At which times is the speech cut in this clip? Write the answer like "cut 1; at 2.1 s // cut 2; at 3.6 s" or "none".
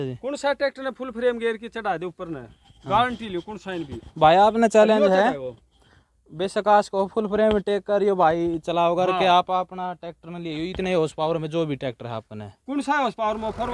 none